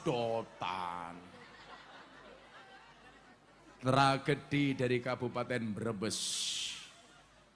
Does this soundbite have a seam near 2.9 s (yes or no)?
yes